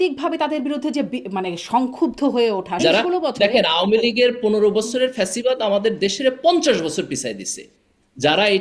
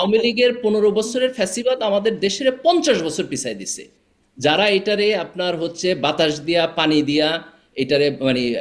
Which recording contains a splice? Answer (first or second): first